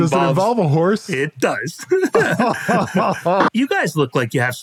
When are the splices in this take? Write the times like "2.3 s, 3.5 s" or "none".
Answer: 3.5 s

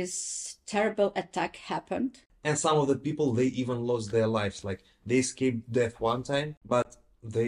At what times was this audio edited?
2.3 s, 6.6 s

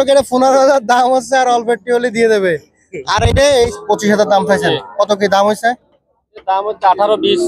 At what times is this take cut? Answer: 3.8 s

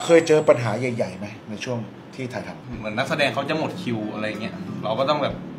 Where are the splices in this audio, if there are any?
none

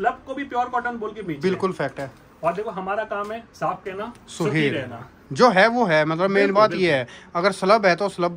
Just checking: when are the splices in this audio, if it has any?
none

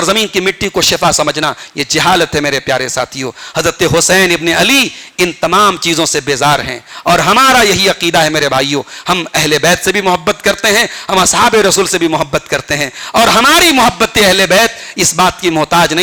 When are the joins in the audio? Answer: none

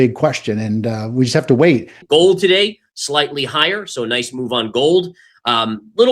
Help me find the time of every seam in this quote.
1.9 s

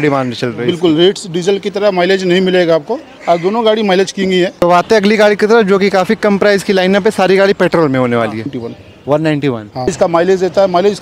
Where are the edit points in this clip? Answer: 4.5 s, 8.6 s, 9.9 s

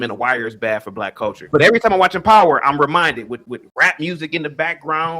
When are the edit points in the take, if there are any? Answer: 1.5 s

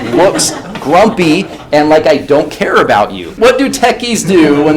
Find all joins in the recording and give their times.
3.4 s

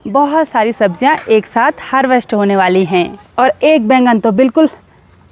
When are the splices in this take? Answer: 3.2 s

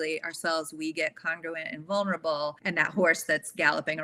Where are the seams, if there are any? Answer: 2.6 s

